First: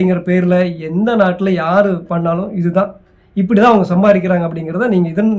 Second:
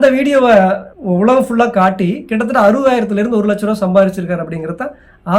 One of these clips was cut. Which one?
second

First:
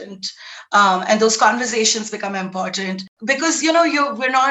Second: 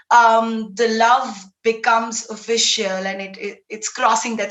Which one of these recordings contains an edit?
first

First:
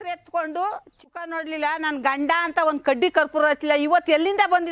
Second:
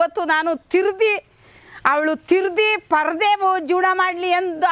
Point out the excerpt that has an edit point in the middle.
first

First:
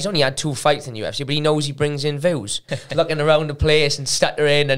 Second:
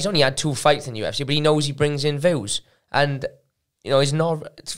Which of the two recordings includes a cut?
first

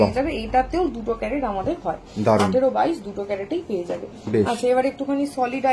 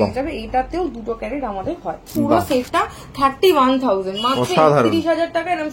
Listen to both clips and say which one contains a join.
second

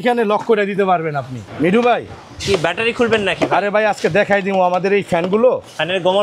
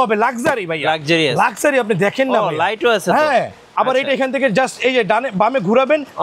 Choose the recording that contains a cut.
first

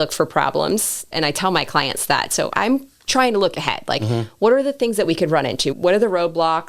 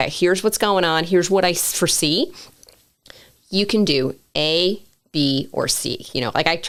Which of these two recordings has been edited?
first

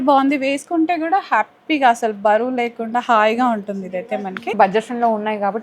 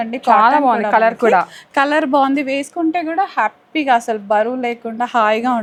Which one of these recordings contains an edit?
first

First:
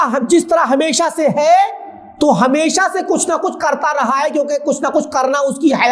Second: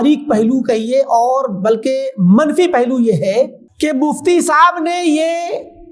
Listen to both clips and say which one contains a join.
second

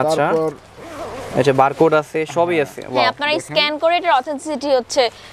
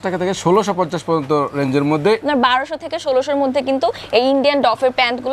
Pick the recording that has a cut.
second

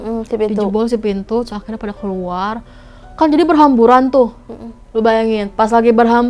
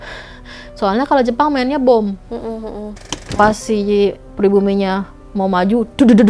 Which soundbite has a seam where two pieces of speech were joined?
second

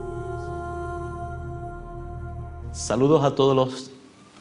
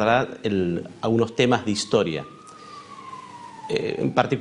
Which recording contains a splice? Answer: second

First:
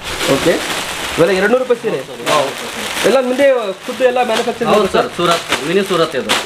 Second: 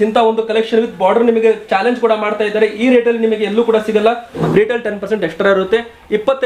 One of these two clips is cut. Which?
second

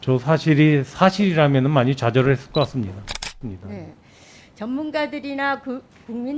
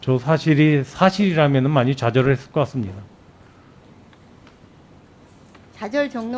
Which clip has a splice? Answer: first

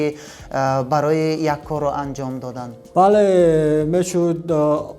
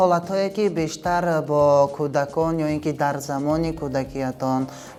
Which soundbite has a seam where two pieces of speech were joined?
first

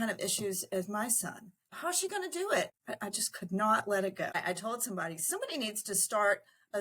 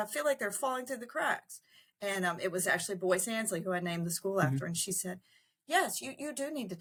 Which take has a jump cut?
first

